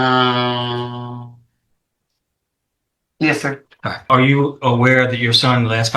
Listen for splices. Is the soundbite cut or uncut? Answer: cut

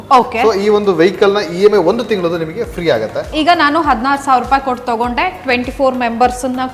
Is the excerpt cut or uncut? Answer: cut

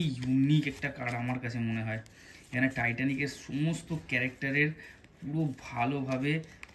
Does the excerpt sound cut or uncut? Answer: uncut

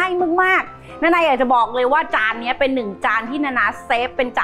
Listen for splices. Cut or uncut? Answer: uncut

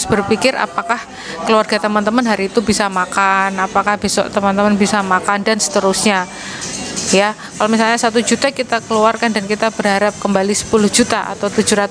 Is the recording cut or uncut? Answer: uncut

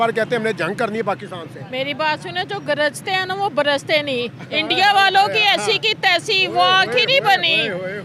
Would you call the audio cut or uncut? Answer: uncut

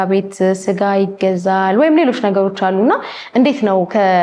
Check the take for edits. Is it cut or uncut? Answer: uncut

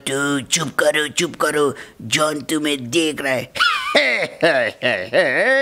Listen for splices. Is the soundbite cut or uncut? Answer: uncut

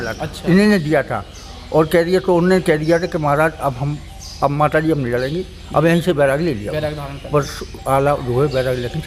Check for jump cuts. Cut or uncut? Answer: uncut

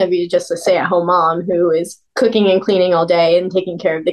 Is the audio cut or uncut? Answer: uncut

